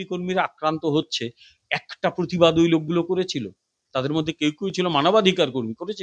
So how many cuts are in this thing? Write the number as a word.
zero